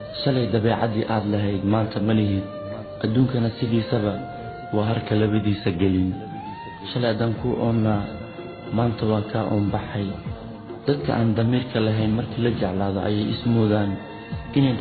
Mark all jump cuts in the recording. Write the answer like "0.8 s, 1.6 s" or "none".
5.6 s

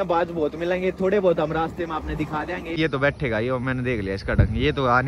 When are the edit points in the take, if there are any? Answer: 2.8 s

